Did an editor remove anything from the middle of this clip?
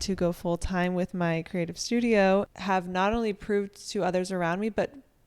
yes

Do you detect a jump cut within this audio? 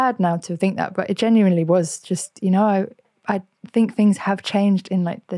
no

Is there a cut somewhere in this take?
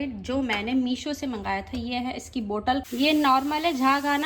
yes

